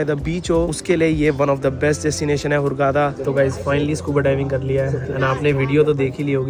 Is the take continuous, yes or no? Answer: no